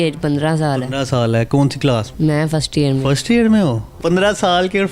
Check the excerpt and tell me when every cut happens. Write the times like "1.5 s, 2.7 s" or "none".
2.1 s, 3.9 s